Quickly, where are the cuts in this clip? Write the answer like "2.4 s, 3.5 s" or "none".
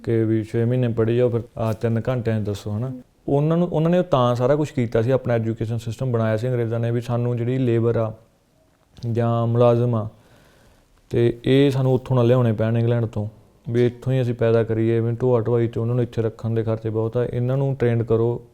1.4 s, 2.8 s